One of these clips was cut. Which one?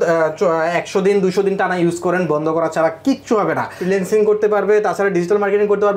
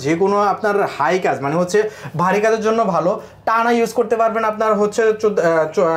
first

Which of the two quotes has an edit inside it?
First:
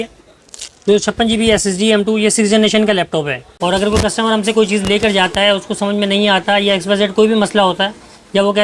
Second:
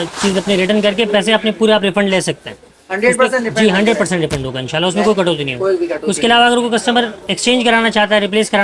first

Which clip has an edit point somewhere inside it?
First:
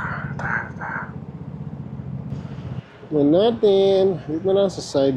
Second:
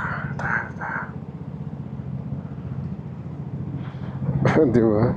first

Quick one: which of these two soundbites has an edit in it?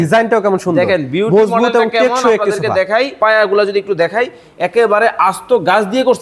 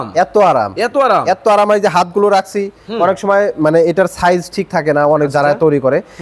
first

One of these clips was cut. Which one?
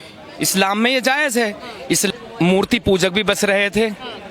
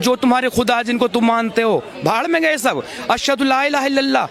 first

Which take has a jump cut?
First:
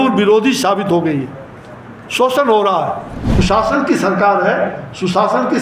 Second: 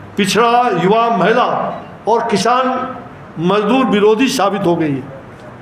first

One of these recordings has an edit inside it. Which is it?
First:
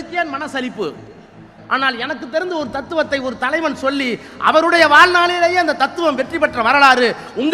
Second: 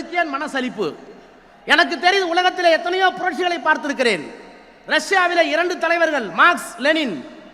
first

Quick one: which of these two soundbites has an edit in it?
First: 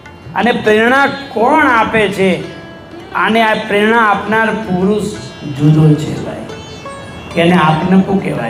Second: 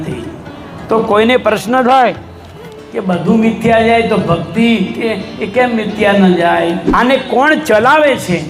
second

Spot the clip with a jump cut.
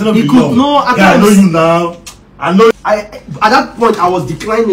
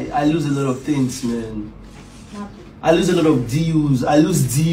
first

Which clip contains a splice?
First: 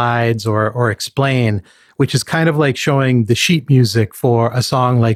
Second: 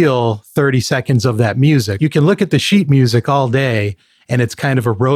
second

